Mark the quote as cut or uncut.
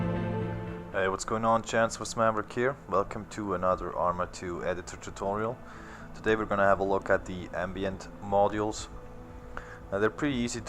cut